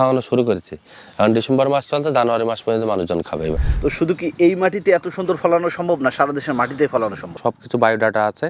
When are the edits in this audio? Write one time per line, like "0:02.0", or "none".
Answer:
0:03.6
0:07.3